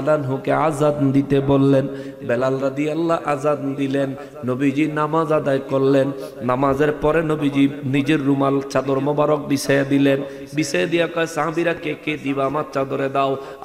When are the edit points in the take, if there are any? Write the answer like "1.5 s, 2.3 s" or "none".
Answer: none